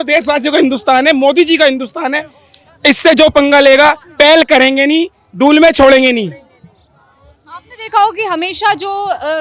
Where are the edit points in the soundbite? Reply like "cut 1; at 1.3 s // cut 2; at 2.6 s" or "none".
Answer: none

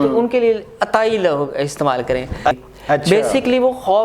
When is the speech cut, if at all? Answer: cut 1; at 2.5 s

